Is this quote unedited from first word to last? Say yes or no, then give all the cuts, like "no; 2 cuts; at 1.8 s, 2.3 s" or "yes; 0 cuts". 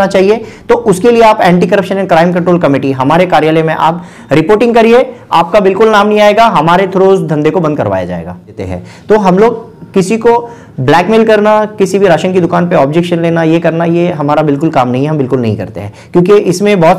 no; 1 cut; at 8.6 s